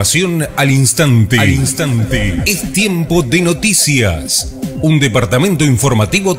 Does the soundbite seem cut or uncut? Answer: uncut